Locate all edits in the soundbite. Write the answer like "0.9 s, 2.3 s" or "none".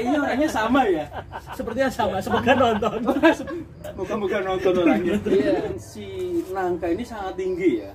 5.7 s